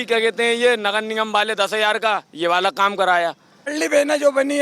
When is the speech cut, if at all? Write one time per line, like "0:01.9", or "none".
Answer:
0:03.5